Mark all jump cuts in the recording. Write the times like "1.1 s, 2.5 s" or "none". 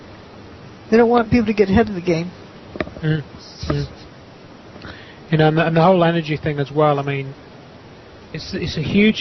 4.0 s